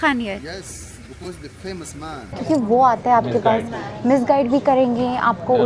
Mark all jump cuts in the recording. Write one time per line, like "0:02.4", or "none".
0:02.3